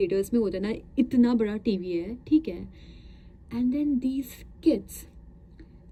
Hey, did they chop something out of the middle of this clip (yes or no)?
no